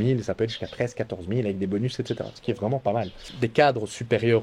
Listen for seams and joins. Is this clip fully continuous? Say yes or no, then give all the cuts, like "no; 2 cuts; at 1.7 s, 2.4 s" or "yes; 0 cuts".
no; 1 cut; at 3.2 s